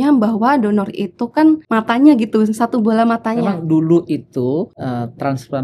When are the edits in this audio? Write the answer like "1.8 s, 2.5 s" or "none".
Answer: 1.6 s, 3.4 s, 4.7 s